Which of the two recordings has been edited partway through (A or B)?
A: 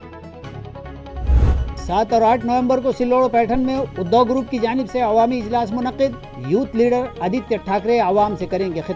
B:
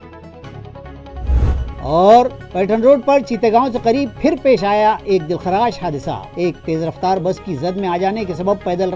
B